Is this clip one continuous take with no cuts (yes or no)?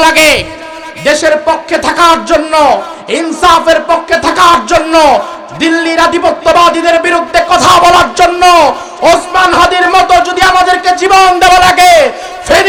yes